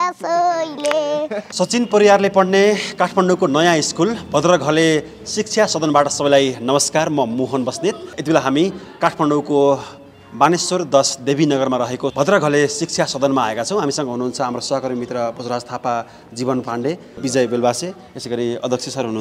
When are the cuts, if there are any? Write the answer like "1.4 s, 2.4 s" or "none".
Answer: none